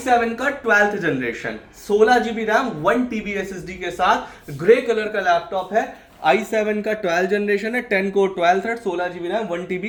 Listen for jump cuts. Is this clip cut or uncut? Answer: uncut